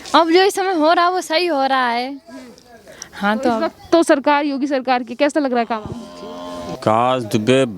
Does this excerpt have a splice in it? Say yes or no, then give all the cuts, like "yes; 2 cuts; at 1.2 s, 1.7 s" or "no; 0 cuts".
yes; 1 cut; at 6.8 s